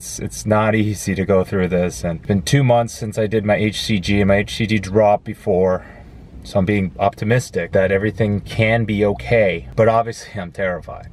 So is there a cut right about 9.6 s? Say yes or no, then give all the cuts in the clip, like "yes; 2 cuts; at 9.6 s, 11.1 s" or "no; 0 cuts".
yes; 3 cuts; at 2.2 s, 7.7 s, 9.6 s